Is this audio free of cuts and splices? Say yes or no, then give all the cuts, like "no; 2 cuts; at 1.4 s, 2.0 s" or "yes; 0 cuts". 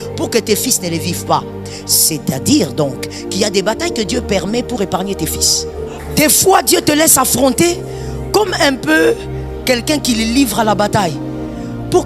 no; 1 cut; at 6.0 s